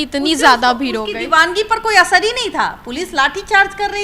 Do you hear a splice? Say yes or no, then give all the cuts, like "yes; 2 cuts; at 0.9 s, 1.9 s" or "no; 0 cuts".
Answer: no; 0 cuts